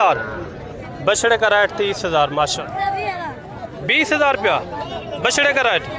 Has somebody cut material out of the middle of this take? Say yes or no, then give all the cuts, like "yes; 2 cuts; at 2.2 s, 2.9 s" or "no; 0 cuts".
yes; 1 cut; at 2.5 s